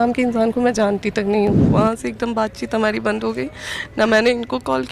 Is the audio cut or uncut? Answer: cut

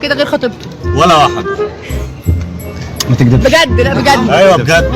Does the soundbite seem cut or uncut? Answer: cut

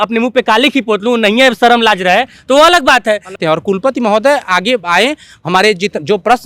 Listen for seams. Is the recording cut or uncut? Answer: cut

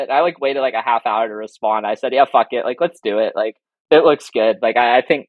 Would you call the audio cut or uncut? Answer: uncut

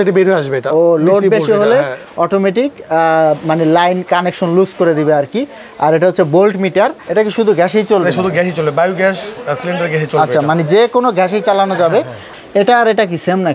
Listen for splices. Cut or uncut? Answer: cut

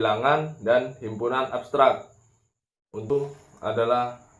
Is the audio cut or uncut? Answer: cut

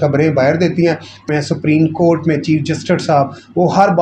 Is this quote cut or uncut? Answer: cut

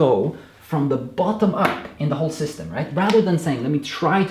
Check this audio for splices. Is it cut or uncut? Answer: uncut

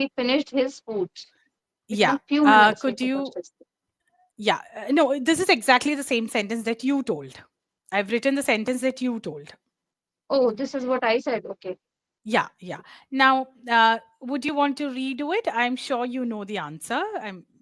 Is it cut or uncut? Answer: uncut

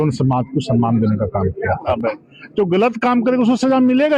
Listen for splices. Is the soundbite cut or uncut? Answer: cut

